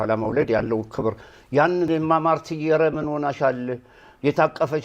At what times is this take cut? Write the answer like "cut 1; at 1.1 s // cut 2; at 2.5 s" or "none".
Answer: cut 1; at 1.9 s